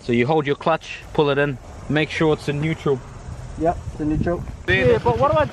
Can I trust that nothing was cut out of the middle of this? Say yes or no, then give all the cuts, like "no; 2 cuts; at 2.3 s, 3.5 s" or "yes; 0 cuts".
no; 2 cuts; at 1.0 s, 1.7 s